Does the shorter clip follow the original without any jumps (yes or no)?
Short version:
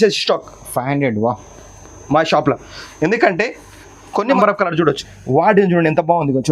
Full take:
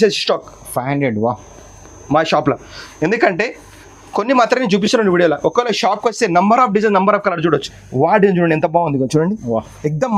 no